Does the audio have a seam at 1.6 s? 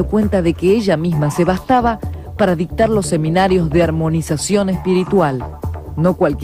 no; 1 cut; at 3.8 s

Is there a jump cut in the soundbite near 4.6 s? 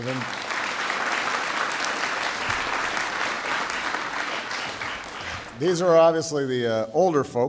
yes; 1 cut; at 4.6 s

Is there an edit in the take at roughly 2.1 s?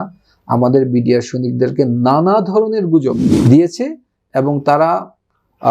no; 1 cut; at 3.3 s

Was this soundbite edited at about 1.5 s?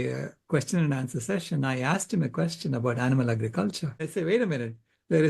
no; 1 cut; at 4.0 s

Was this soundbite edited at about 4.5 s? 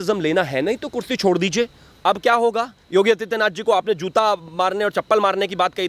no; 1 cut; at 1.9 s

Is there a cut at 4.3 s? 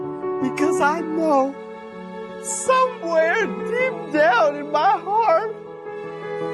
no; 0 cuts

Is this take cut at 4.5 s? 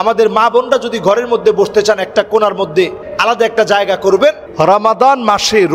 yes; 2 cuts; at 3.0 s, 4.5 s

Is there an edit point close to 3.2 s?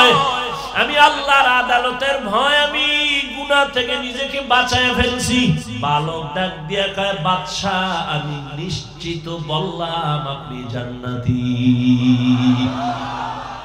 no; 1 cut; at 5.7 s

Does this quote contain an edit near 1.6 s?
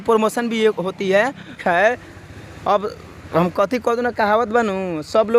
yes; 1 cut; at 1.6 s

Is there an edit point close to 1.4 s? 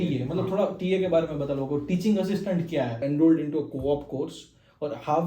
no; 1 cut; at 3.0 s

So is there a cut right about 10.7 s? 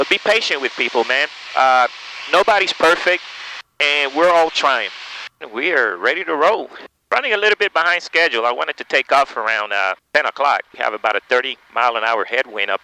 yes; 3 cuts; at 5.5 s, 10.0 s, 10.7 s

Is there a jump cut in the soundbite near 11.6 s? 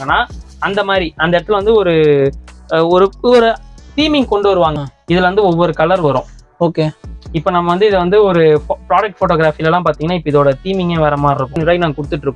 yes; 2 cuts; at 4.8 s, 11.6 s

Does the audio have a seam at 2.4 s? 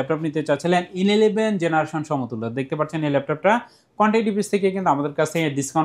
no; 0 cuts

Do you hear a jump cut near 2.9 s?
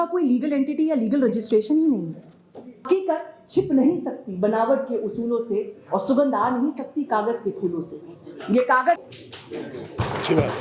yes; 2 cuts; at 2.9 s, 9.1 s

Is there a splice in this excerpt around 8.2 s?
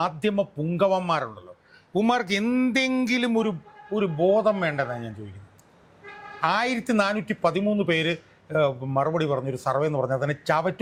no; 0 cuts

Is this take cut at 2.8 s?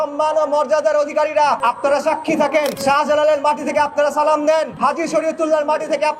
yes; 3 cuts; at 1.6 s, 2.8 s, 4.7 s

